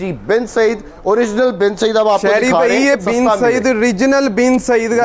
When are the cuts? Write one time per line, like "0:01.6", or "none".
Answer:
0:03.0